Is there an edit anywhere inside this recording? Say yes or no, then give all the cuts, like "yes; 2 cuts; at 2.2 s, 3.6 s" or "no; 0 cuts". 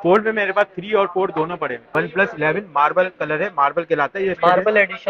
yes; 1 cut; at 1.8 s